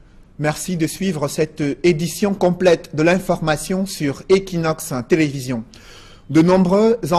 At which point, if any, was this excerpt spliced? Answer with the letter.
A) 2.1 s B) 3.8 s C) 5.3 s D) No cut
A